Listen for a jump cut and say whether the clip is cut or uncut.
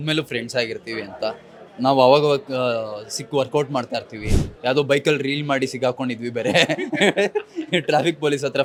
uncut